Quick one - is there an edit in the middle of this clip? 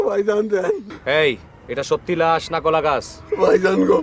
yes; 1 cut; at 0.9 s

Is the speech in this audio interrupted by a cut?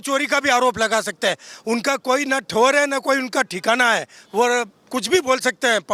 no; 0 cuts

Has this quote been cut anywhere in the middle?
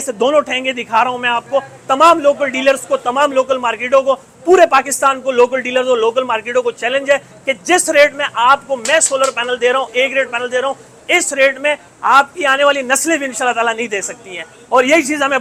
no; 0 cuts

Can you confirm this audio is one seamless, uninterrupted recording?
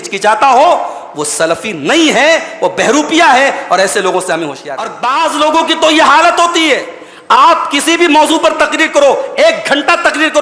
no; 1 cut; at 4.9 s

